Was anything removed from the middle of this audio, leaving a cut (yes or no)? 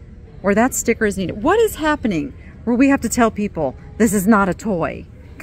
no